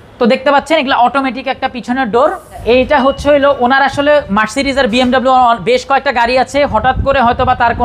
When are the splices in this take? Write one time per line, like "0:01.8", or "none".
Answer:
0:02.6